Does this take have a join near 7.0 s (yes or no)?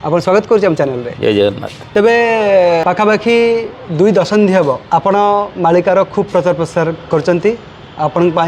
no